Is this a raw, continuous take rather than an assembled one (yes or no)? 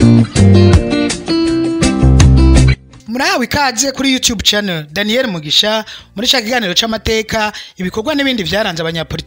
yes